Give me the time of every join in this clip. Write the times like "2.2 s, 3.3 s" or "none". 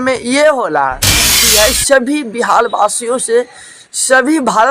1.4 s